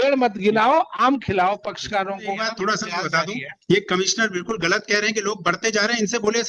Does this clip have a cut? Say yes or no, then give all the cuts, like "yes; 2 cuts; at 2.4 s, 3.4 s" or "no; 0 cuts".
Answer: yes; 1 cut; at 2.4 s